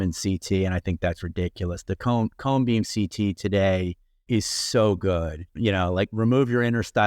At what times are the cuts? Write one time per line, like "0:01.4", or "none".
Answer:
0:04.2
0:05.6